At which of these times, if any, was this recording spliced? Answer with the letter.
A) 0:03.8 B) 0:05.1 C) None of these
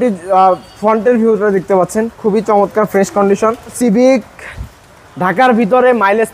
A